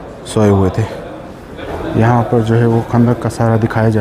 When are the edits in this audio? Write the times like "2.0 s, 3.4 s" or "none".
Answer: 1.7 s